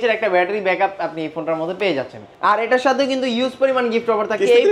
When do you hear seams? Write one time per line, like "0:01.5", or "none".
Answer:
0:02.2